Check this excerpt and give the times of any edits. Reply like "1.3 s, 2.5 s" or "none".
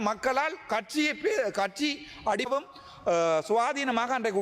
2.5 s